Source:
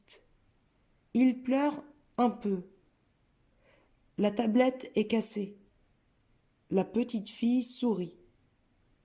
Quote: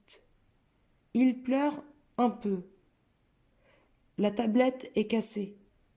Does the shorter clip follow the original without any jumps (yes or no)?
yes